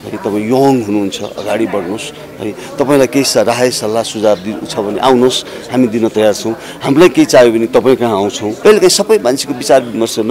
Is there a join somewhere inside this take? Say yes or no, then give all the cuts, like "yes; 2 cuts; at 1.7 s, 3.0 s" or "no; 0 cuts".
yes; 1 cut; at 8.4 s